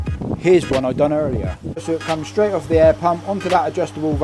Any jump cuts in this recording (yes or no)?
yes